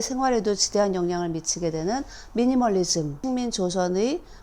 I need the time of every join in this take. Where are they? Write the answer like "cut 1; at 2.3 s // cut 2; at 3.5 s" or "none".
cut 1; at 3.2 s